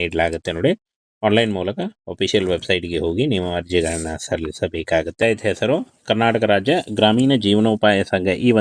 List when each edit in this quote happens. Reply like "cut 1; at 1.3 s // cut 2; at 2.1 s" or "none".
cut 1; at 5.1 s

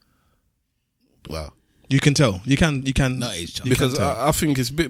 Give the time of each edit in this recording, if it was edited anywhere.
none

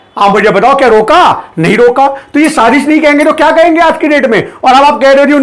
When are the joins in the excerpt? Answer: none

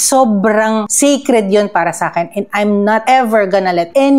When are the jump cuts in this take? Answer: none

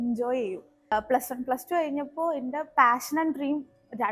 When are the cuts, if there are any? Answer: cut 1; at 0.9 s

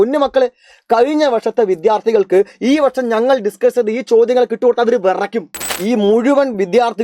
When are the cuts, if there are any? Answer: cut 1; at 5.7 s

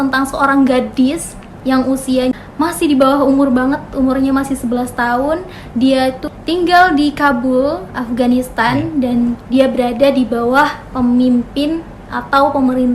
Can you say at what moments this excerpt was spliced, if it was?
cut 1; at 2.3 s // cut 2; at 6.3 s

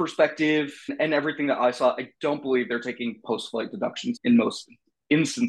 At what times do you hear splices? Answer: cut 1; at 0.9 s // cut 2; at 4.2 s

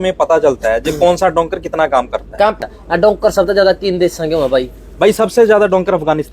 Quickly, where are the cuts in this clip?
cut 1; at 2.6 s

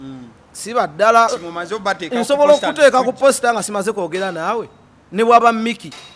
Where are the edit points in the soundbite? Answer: cut 1; at 1.4 s

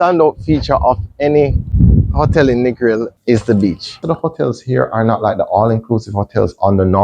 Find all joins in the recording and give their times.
cut 1; at 1.6 s // cut 2; at 3.1 s // cut 3; at 4.0 s

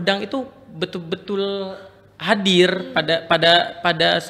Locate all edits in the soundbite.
none

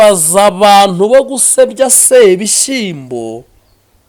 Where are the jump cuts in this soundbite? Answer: none

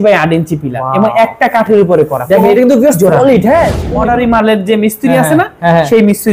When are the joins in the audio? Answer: cut 1; at 3.9 s

